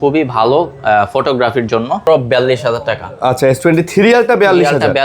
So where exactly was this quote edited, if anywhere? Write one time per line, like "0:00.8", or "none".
0:02.0